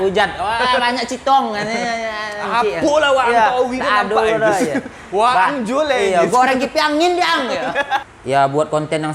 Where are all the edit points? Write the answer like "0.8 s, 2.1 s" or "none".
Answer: 8.1 s